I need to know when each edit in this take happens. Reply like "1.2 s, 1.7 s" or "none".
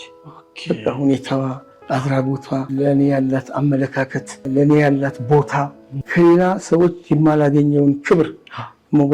2.7 s, 4.5 s, 5.9 s

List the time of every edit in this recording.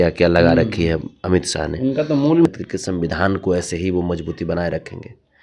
2.5 s

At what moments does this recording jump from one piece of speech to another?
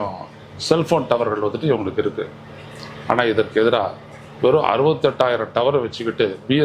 none

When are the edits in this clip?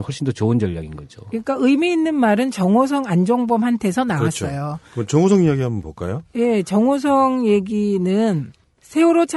none

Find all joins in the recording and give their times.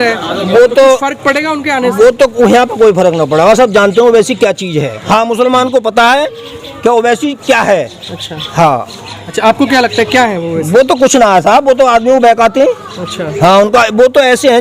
5.0 s

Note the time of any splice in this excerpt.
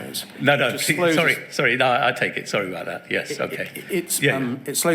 none

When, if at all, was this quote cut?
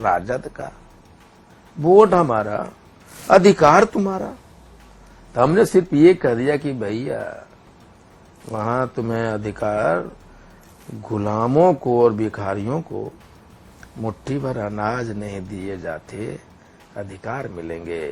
none

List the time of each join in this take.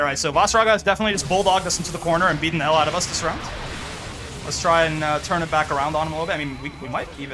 none

